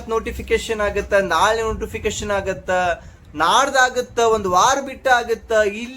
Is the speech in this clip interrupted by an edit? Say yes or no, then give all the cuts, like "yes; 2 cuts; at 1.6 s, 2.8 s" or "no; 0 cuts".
no; 0 cuts